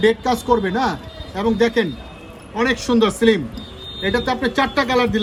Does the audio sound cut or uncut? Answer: uncut